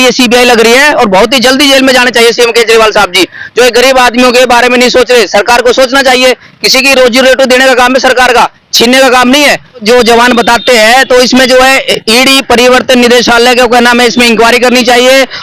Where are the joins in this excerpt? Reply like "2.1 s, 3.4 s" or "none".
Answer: 9.8 s